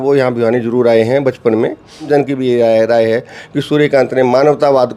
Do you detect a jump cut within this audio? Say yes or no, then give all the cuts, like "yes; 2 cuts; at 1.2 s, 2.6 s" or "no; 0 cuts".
yes; 1 cut; at 2.1 s